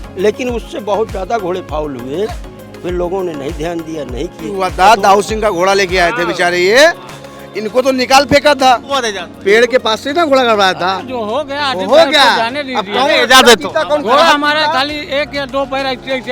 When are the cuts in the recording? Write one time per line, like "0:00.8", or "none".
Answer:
0:04.6
0:09.2